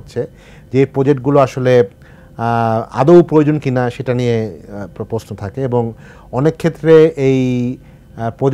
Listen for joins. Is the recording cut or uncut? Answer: uncut